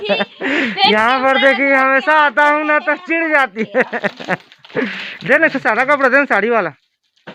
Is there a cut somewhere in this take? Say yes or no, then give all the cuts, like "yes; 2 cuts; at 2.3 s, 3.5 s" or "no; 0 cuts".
no; 0 cuts